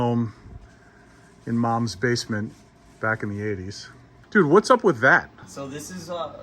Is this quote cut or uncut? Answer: cut